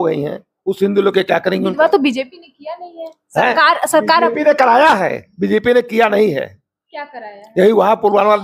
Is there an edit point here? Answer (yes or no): no